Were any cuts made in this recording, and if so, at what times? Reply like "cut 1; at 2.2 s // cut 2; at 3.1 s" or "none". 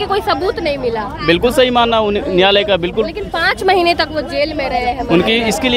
none